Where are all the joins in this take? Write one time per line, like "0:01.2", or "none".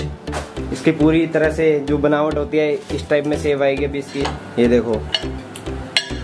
0:04.2